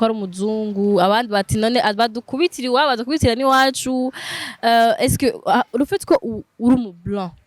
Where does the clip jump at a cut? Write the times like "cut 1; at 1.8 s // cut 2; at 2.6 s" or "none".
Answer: none